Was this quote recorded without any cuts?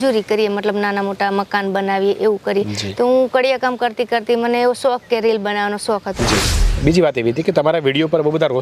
no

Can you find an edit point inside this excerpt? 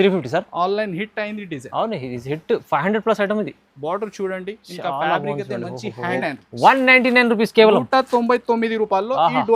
yes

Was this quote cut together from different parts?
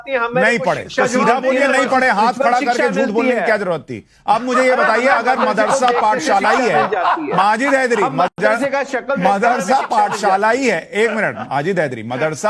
no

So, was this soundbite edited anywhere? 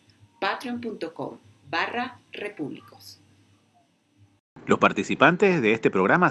yes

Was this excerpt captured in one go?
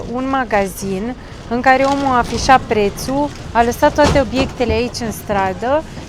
yes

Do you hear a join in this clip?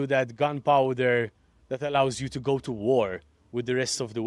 no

